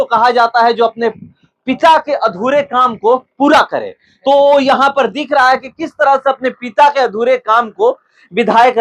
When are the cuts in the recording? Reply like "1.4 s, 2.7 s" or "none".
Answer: none